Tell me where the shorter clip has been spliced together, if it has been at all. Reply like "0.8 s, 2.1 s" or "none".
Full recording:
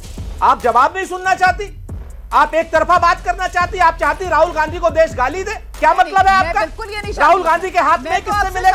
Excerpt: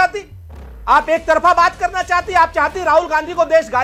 none